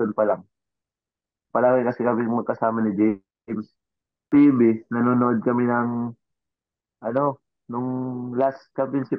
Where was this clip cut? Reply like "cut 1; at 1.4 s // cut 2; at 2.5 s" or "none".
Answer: cut 1; at 4.3 s